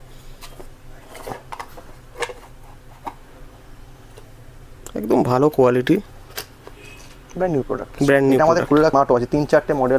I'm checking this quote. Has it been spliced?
yes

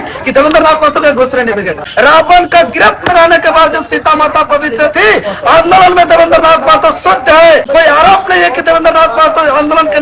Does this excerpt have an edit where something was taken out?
yes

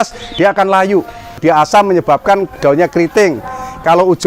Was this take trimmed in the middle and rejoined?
yes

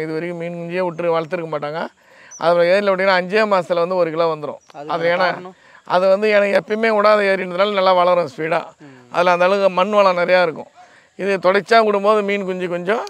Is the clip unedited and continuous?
yes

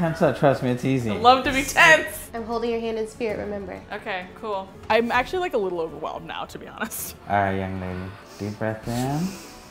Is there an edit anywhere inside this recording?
yes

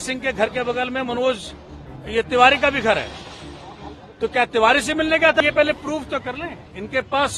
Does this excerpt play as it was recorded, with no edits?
no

